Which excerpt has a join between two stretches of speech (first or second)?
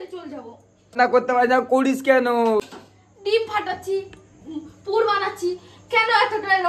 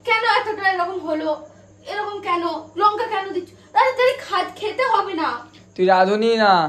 first